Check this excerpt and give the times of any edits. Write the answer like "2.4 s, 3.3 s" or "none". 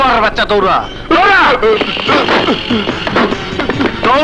none

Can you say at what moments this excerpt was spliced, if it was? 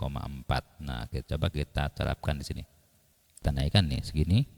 3.4 s

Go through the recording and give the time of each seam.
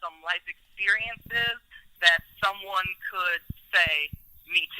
none

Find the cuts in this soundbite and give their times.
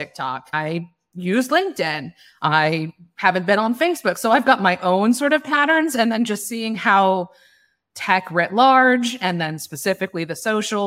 none

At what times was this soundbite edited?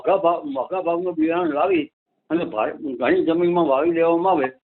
none

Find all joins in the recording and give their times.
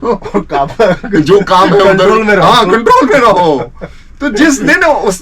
none

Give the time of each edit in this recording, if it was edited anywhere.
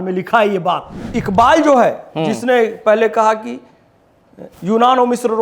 1.1 s

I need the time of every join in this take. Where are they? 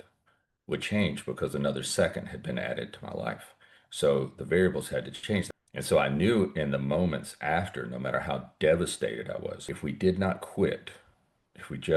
5.5 s, 9.6 s

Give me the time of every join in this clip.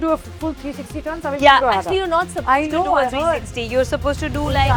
none

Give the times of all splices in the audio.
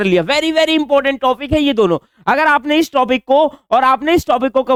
none

